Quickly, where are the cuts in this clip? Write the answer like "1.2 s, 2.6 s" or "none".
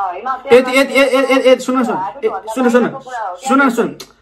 none